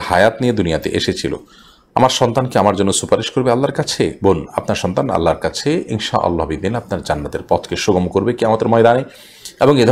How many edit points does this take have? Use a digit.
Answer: 0